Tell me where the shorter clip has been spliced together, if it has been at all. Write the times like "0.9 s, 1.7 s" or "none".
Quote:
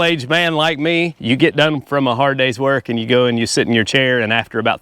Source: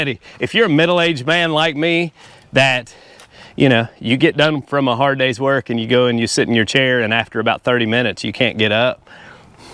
1.2 s